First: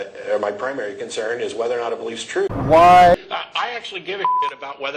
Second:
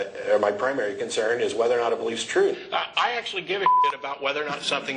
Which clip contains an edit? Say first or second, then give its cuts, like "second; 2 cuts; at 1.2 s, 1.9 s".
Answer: second; 1 cut; at 2.6 s